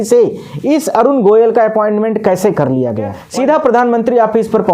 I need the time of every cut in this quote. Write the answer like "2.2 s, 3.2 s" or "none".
3.2 s